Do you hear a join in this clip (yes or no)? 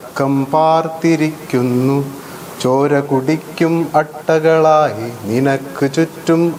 no